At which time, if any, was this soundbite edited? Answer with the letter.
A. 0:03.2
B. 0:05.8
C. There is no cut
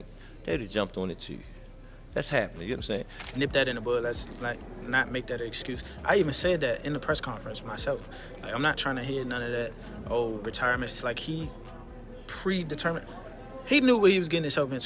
A